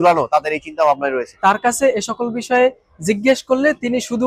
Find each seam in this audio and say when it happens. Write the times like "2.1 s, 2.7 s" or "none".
1.4 s